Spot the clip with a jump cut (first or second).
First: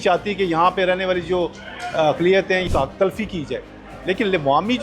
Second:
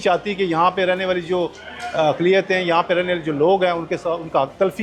first